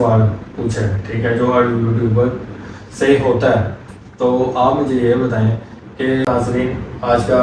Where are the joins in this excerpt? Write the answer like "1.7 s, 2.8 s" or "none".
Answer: 6.2 s